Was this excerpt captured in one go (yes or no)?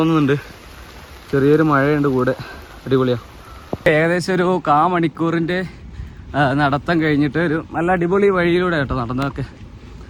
yes